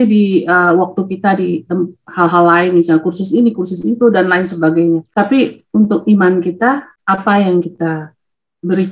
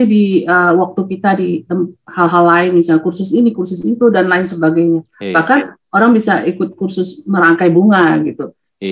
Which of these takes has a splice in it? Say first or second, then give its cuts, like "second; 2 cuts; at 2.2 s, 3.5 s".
first; 2 cuts; at 5.1 s, 6.9 s